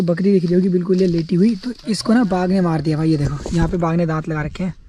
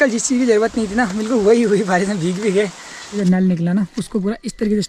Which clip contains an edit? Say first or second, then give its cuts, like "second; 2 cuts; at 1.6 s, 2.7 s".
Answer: second; 1 cut; at 3.2 s